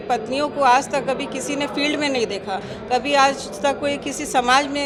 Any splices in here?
no; 0 cuts

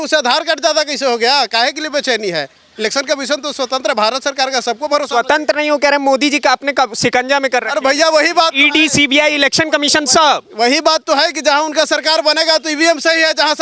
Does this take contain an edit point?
no; 0 cuts

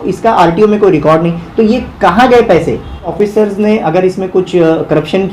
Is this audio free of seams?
no; 1 cut; at 3.2 s

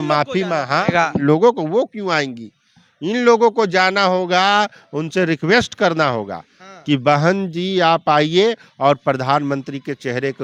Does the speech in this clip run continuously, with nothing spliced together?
yes; 0 cuts

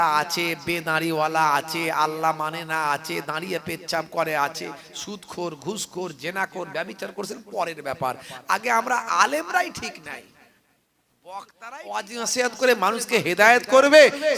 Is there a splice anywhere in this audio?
yes; 1 cut; at 11.9 s

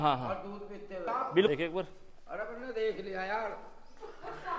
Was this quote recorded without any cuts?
no; 1 cut; at 1.5 s

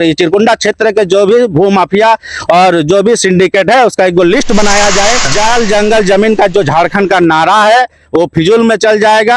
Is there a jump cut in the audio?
yes; 1 cut; at 5.3 s

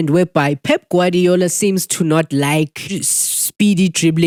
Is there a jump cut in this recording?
no; 0 cuts

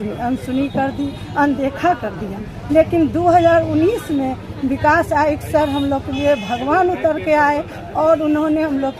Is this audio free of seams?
yes; 0 cuts

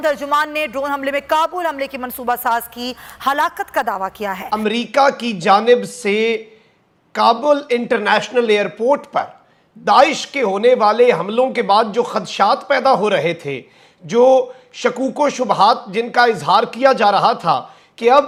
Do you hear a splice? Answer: no; 0 cuts

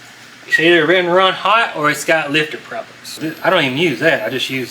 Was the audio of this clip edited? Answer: yes; 1 cut; at 3.0 s

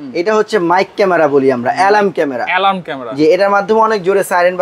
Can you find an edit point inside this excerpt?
no; 0 cuts

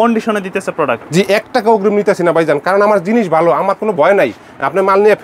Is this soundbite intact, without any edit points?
yes; 0 cuts

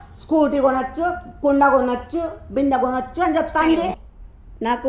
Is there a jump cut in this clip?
no; 0 cuts

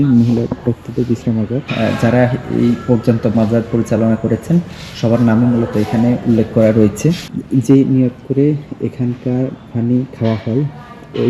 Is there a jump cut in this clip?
yes; 2 cuts; at 1.6 s, 7.3 s

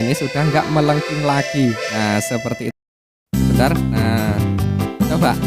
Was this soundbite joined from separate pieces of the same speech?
yes; 1 cut; at 2.7 s

